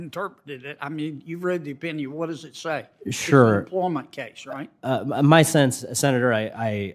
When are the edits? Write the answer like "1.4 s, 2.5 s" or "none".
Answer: none